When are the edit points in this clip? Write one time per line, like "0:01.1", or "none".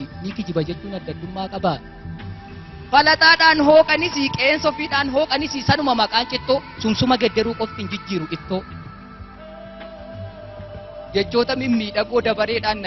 0:07.7